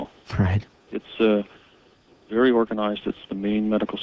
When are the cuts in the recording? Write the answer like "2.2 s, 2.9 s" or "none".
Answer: 1.5 s